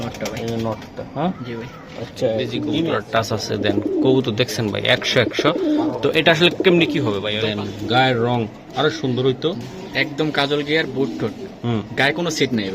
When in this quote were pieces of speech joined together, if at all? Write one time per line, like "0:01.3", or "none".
0:02.6
0:07.3